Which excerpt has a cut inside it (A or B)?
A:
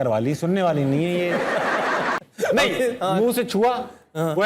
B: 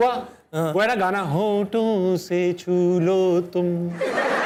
A